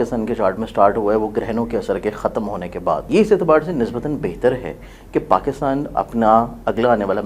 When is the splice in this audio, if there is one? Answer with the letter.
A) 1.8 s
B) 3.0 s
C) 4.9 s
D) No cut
B